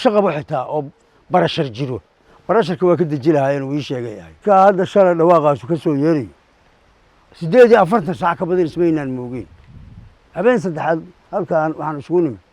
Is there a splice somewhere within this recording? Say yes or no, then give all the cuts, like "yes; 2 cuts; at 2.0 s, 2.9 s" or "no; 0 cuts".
yes; 1 cut; at 4.4 s